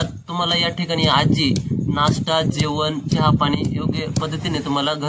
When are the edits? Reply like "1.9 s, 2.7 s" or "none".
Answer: none